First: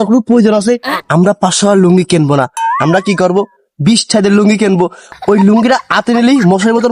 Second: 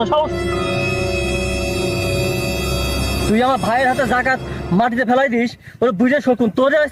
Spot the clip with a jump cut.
first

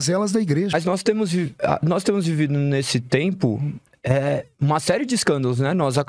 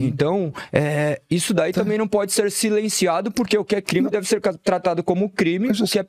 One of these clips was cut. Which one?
first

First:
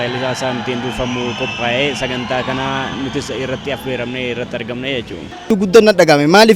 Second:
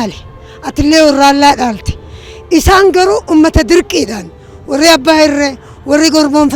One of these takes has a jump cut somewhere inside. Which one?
first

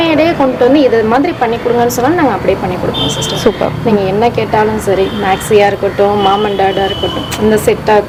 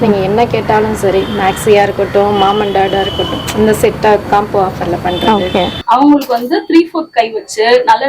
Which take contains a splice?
second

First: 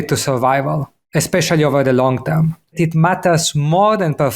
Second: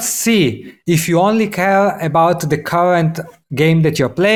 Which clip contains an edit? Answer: first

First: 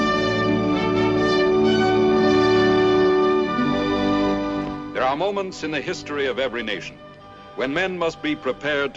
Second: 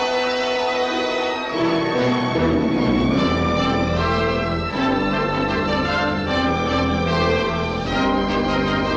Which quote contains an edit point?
first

